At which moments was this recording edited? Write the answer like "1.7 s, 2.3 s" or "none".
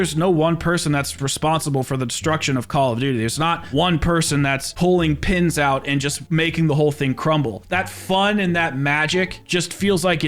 1.2 s, 4.7 s, 7.6 s